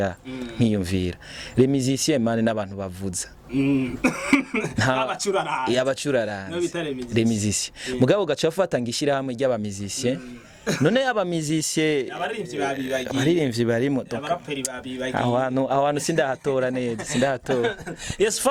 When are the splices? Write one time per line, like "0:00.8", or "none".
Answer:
none